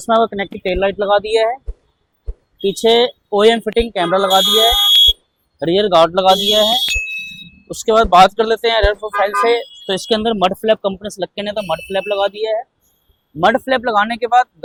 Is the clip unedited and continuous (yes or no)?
yes